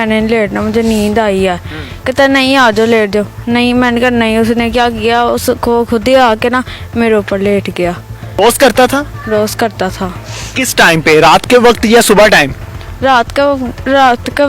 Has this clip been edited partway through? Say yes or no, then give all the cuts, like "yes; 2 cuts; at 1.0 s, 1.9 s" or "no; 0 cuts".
yes; 1 cut; at 8.3 s